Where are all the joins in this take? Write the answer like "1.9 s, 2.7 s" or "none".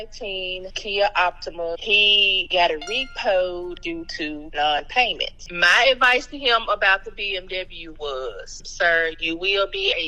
5.3 s